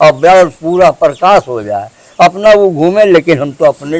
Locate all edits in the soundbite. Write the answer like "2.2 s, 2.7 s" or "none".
none